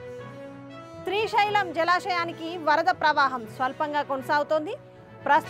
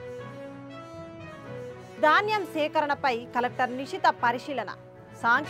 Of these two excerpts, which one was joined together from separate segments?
second; 1 cut; at 1.0 s

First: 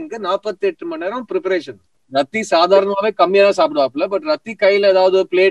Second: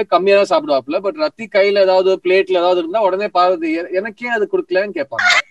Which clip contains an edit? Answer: first; 1 cut; at 2.0 s

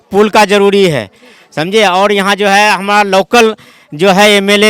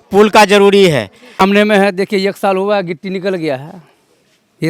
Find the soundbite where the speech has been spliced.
second; 1 cut; at 1.4 s

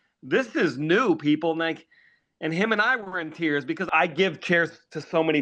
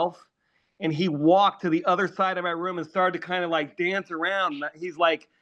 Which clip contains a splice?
first; 1 cut; at 3.9 s

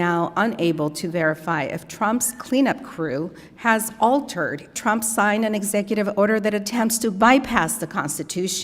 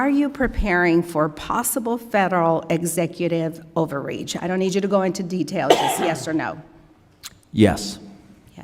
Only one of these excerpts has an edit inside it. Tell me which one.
first; 1 cut; at 4.7 s

